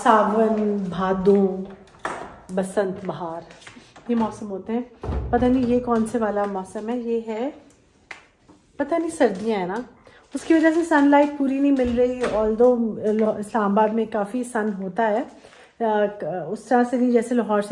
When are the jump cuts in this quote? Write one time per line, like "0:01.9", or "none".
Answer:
none